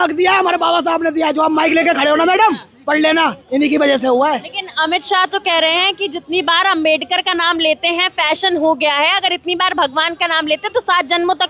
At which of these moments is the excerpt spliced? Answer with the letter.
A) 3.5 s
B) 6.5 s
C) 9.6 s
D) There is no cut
D